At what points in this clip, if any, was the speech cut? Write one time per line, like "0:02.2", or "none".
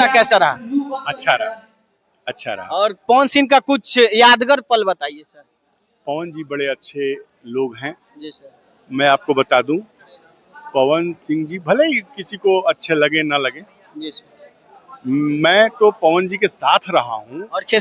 none